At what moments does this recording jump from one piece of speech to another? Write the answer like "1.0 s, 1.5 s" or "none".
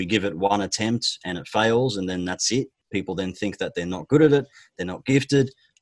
2.8 s